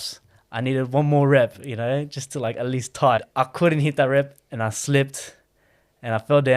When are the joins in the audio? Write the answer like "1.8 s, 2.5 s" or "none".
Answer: 3.2 s